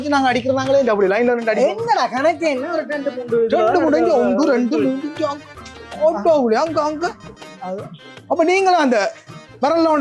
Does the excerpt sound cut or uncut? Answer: uncut